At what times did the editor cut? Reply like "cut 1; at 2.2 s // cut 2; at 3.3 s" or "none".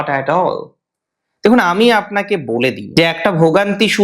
cut 1; at 2.8 s